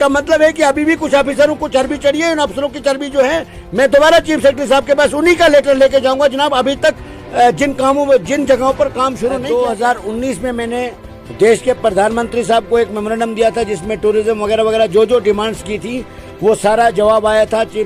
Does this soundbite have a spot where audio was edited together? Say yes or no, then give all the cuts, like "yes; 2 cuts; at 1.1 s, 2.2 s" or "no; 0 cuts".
yes; 1 cut; at 9.3 s